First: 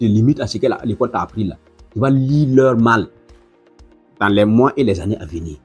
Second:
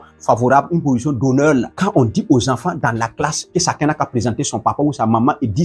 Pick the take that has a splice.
second; 2 cuts; at 1.7 s, 3.4 s

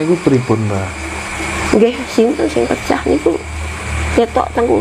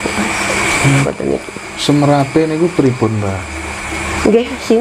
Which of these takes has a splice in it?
second; 1 cut; at 1.0 s

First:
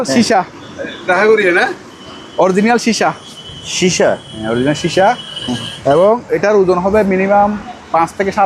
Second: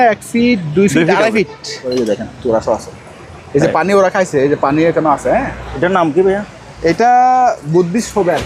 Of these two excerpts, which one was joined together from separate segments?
second; 2 cuts; at 1.9 s, 5.6 s

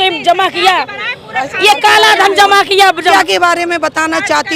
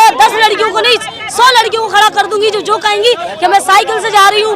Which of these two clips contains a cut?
first; 1 cut; at 3.1 s

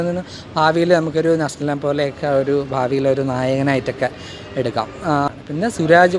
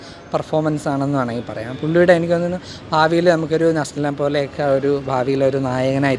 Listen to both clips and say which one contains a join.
first; 1 cut; at 5.3 s

